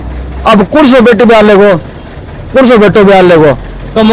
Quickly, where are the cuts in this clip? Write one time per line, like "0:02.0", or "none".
none